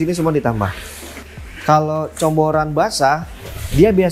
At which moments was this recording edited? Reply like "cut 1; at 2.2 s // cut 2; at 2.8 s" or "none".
cut 1; at 1.1 s